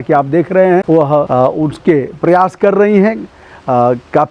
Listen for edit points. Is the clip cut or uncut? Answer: cut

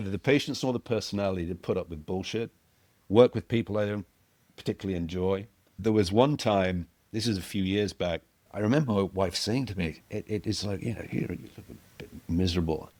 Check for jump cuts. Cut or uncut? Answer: uncut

